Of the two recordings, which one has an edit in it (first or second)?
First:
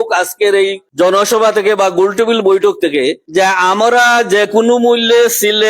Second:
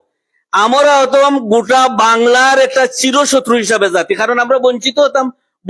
first